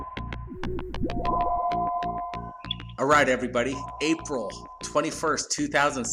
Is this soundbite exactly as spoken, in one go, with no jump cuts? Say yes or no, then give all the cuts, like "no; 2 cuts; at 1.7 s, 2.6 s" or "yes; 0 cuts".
yes; 0 cuts